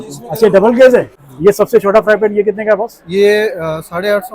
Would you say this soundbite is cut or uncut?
cut